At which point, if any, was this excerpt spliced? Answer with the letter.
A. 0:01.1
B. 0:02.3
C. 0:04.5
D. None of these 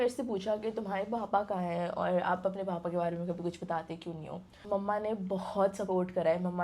C